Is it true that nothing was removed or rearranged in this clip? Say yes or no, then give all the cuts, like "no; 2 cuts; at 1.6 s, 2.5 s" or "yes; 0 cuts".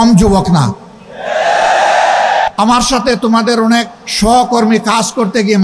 no; 2 cuts; at 2.5 s, 4.0 s